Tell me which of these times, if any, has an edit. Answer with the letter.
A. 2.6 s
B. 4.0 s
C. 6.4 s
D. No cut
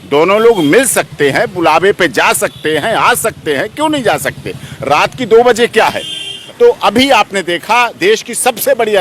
C